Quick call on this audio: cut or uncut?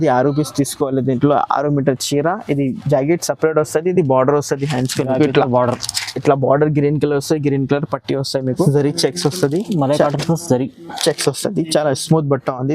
cut